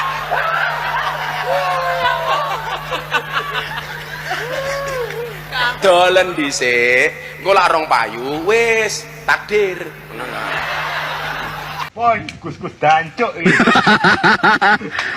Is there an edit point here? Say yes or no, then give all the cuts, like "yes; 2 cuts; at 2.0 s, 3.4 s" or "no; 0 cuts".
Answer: yes; 1 cut; at 11.8 s